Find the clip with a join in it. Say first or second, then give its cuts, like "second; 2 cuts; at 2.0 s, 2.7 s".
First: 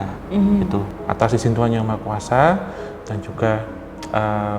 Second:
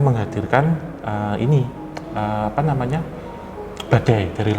first; 1 cut; at 0.9 s